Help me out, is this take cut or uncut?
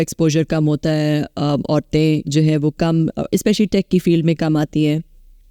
uncut